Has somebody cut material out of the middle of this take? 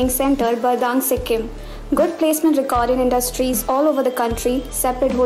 no; 0 cuts

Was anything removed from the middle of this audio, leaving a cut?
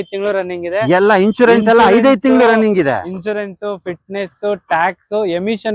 no; 0 cuts

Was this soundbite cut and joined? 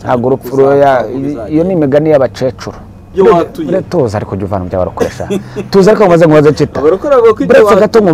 yes; 1 cut; at 3.1 s

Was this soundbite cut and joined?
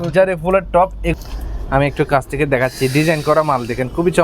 yes; 1 cut; at 1.1 s

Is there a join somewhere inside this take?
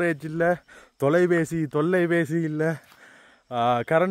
no; 0 cuts

